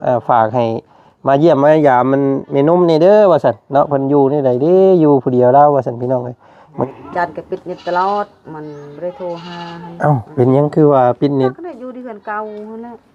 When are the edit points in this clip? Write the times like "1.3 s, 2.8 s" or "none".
6.8 s